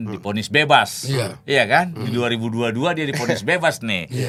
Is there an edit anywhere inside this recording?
no; 0 cuts

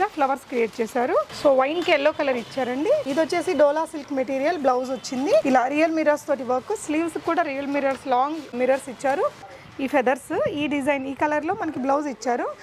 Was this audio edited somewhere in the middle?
yes; 5 cuts; at 1.3 s, 3.1 s, 5.4 s, 8.5 s, 9.5 s

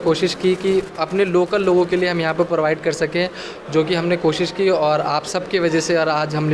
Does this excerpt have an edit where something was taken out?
no; 0 cuts

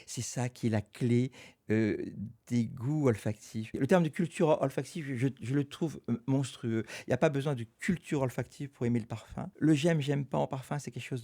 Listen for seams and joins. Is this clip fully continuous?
no; 2 cuts; at 3.7 s, 9.5 s

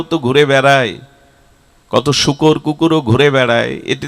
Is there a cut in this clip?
no; 0 cuts

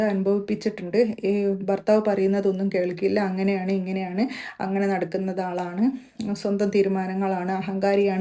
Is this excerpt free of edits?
yes; 0 cuts

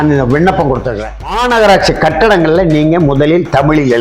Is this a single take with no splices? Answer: no; 1 cut; at 1.4 s

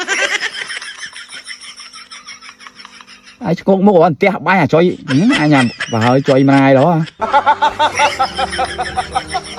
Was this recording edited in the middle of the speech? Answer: no; 0 cuts

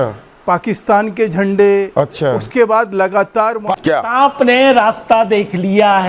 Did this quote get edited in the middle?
yes; 1 cut; at 3.6 s

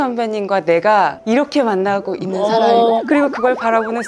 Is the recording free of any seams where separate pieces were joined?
no; 2 cuts; at 1.2 s, 3.0 s

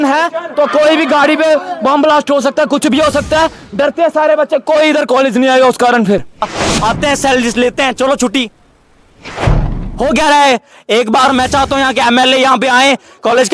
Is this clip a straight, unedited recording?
no; 1 cut; at 6.5 s

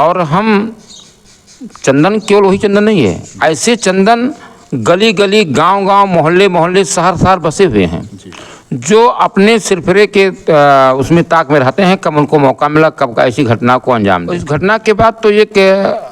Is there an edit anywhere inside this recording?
yes; 1 cut; at 14.4 s

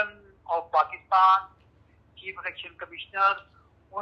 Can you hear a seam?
no; 0 cuts

